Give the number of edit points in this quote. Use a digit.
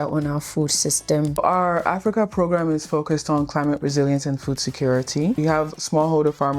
2